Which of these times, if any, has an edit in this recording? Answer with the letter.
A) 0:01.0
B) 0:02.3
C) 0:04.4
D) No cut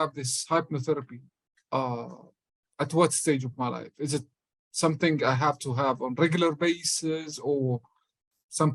D